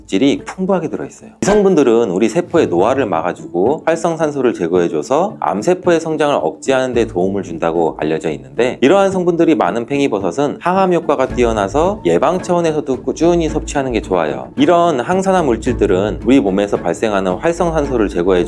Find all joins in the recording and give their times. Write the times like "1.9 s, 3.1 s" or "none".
1.4 s